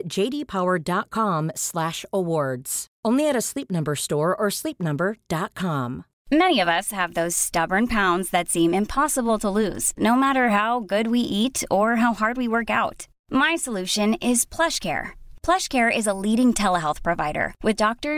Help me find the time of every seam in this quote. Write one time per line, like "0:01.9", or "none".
0:06.1